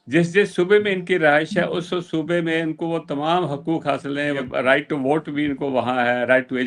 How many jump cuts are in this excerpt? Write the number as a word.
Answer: one